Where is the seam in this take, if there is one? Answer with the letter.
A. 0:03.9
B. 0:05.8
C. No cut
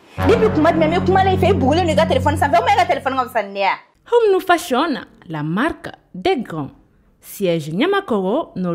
A